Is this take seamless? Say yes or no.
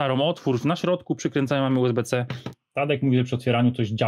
no